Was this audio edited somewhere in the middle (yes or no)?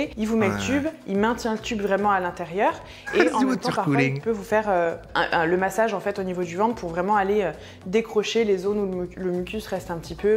no